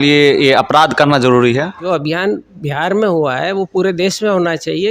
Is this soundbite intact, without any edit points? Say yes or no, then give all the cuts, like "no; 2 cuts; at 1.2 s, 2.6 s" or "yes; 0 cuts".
no; 1 cut; at 1.8 s